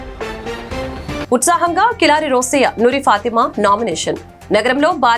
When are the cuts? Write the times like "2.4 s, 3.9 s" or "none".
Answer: 1.3 s